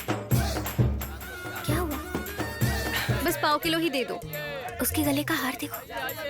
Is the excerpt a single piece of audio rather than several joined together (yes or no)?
no